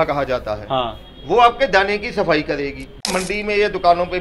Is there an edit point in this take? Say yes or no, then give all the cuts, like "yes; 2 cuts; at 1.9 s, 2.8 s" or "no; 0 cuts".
yes; 1 cut; at 3.1 s